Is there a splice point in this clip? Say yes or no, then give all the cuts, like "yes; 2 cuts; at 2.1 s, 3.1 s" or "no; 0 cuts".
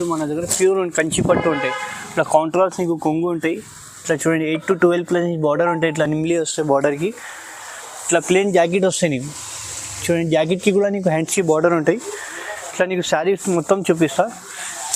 no; 0 cuts